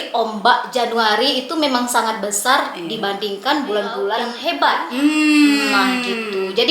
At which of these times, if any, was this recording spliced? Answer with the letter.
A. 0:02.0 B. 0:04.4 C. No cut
B